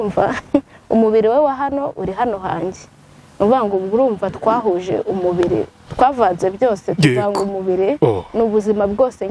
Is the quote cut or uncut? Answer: uncut